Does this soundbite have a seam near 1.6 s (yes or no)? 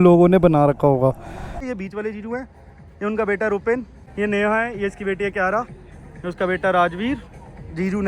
yes